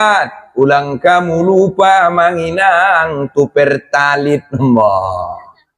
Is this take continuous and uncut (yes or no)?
yes